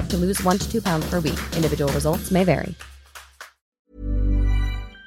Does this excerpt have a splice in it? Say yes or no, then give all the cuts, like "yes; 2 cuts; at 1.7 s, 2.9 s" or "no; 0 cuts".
yes; 1 cut; at 3.7 s